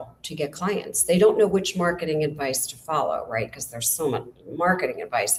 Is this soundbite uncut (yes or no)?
yes